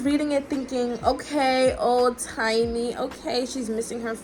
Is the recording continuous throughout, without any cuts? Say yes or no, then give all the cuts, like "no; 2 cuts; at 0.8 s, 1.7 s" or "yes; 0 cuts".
yes; 0 cuts